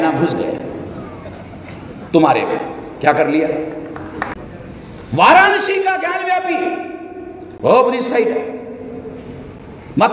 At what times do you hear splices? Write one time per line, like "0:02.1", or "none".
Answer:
0:04.4